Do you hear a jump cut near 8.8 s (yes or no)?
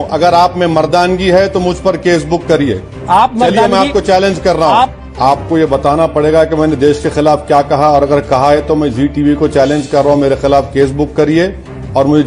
no